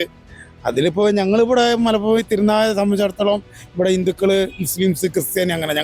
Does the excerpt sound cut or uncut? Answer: uncut